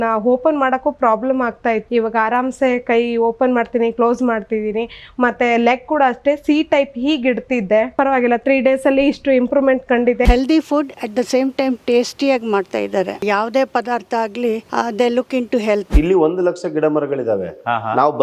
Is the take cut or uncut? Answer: cut